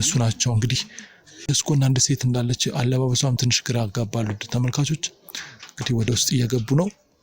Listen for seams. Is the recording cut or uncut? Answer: cut